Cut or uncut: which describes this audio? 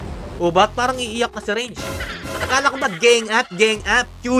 uncut